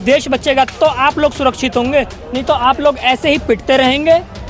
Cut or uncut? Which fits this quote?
uncut